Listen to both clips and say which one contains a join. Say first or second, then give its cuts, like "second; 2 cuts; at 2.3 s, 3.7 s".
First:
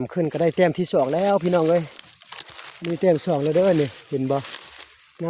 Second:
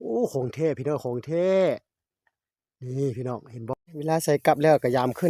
second; 1 cut; at 3.7 s